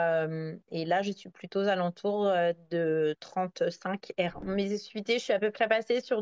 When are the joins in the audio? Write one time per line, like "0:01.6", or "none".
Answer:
0:04.5